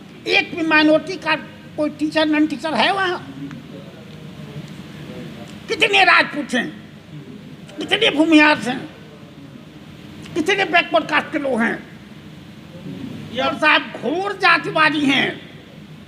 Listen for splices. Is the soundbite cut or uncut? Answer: cut